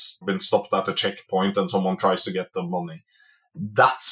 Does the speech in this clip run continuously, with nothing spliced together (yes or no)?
no